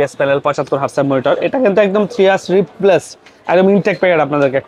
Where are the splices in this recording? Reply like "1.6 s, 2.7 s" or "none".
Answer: none